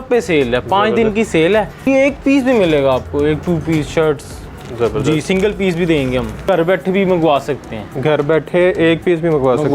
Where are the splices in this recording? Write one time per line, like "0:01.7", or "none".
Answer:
0:01.9
0:06.4

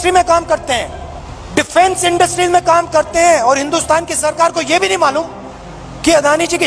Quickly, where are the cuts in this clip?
none

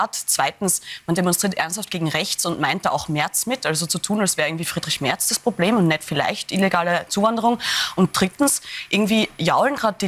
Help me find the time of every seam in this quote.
none

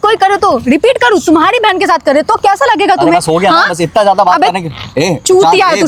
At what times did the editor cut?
none

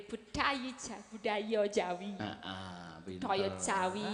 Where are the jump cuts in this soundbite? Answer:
none

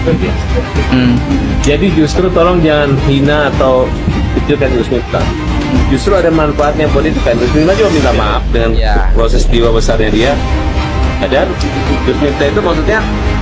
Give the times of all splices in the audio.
none

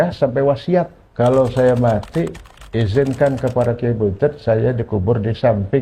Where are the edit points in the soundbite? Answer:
0:01.0

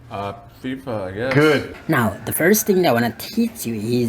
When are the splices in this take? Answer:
none

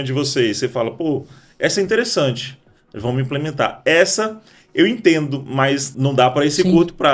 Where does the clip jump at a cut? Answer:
0:05.9

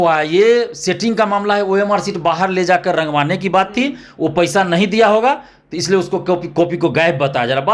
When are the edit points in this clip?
none

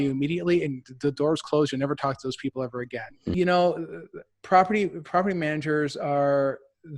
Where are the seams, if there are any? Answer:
0:03.3

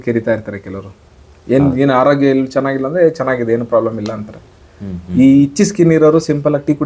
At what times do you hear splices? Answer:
none

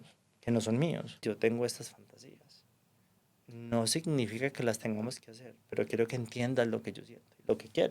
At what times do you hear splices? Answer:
0:01.2

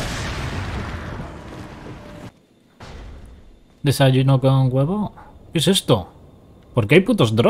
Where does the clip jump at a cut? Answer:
0:02.3

